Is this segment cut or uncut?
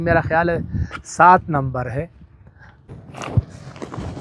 cut